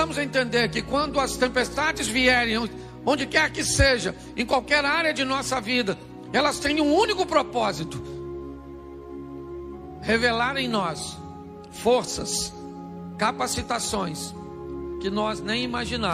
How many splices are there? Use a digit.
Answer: 0